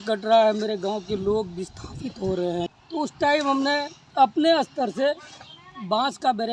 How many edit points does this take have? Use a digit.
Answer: 1